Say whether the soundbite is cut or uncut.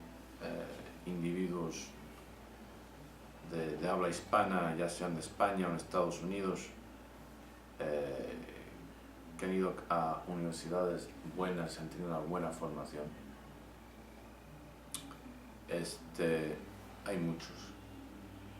cut